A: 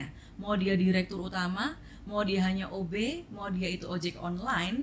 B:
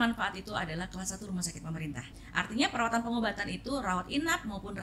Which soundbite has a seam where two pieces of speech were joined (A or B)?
B